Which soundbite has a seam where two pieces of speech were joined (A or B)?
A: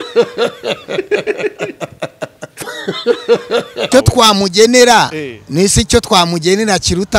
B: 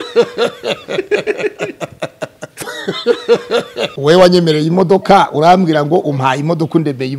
B